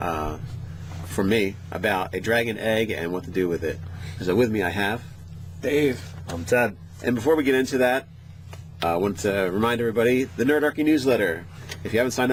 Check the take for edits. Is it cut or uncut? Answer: uncut